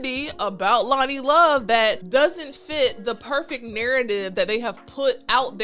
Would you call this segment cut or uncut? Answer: cut